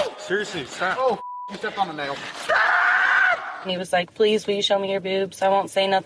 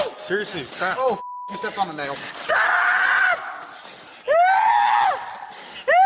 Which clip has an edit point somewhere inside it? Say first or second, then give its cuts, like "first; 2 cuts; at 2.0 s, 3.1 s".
first; 1 cut; at 3.6 s